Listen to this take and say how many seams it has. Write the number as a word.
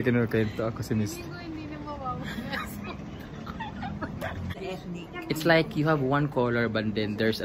one